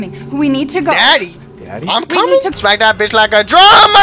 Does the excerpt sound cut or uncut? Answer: cut